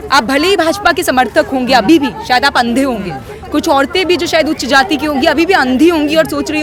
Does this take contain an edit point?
no; 0 cuts

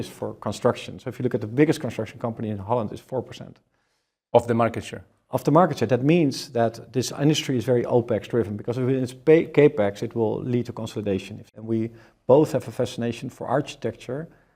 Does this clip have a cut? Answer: yes; 1 cut; at 11.6 s

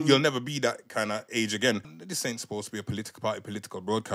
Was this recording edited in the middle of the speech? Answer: yes; 1 cut; at 2.0 s

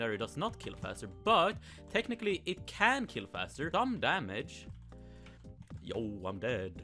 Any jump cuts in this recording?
yes; 1 cut; at 3.7 s

